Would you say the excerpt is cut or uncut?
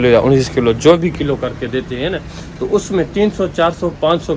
uncut